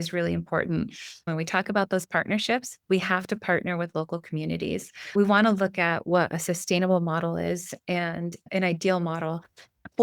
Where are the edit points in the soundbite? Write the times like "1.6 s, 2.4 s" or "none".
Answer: 1.3 s, 5.1 s